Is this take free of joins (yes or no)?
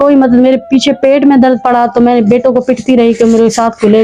yes